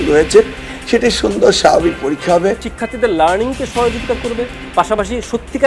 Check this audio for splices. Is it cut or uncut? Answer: cut